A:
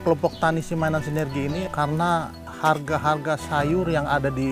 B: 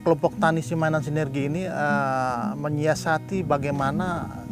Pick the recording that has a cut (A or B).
A